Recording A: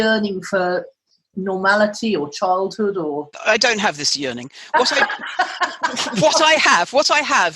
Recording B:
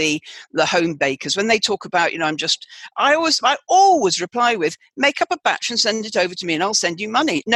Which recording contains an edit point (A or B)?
A